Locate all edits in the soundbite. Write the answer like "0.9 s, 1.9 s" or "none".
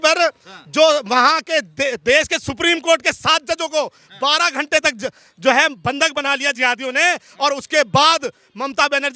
none